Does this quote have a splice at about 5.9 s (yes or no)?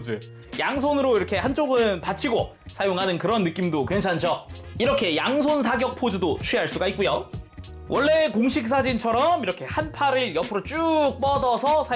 no